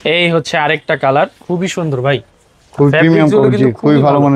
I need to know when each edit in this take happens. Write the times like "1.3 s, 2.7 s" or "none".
none